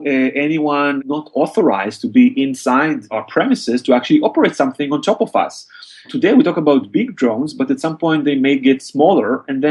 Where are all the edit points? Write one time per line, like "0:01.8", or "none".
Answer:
0:01.0
0:03.2
0:06.1